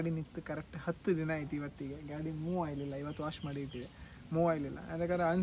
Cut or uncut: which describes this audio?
uncut